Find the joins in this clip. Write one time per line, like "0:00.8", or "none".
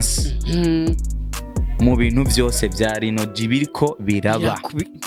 none

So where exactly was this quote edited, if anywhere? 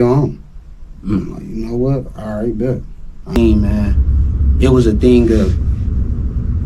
0:03.4

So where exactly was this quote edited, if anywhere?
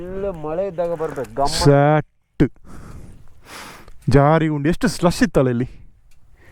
none

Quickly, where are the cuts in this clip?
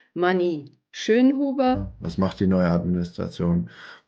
0:01.9

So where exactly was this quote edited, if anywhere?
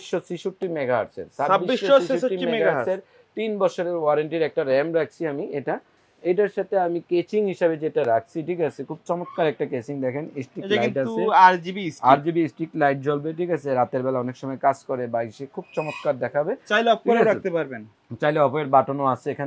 none

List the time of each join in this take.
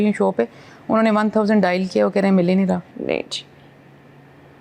0:02.9

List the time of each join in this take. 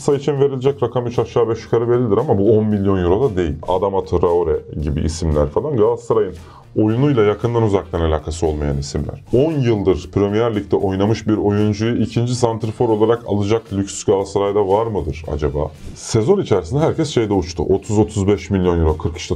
0:03.6
0:09.2
0:15.8

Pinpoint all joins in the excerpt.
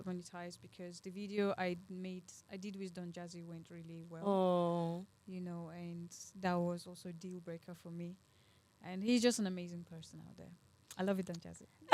none

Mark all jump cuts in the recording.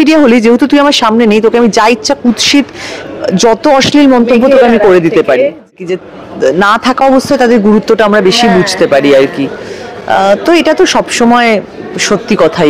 0:05.8

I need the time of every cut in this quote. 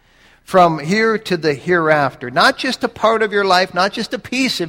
none

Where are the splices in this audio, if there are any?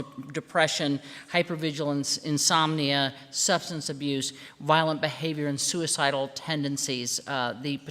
0:01.4

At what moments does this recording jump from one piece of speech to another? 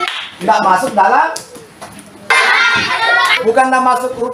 0:02.3
0:03.4

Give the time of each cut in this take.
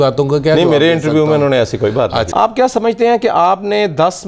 0:02.3

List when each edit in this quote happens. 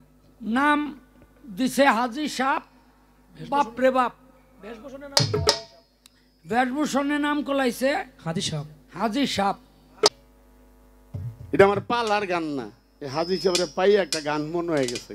0:10.2

